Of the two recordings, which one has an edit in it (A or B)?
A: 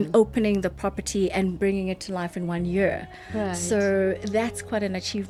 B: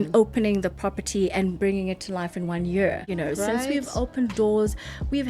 B